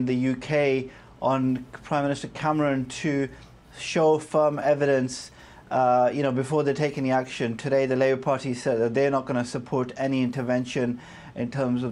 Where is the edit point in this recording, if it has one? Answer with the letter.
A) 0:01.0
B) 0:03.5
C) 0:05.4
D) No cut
D